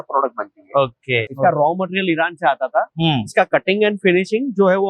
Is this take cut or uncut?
cut